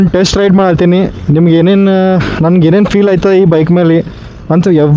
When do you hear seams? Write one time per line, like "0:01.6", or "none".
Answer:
none